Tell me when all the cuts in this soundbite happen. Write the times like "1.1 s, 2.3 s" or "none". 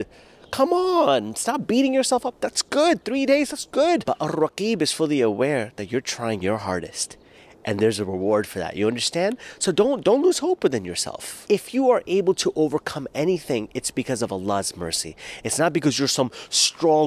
4.0 s, 11.4 s